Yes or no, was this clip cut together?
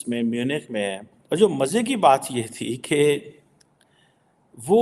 yes